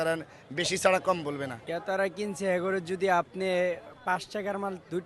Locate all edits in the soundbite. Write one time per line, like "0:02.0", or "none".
0:01.7